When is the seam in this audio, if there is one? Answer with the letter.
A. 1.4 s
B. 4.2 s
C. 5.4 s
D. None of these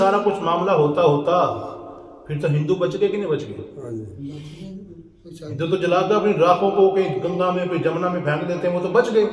D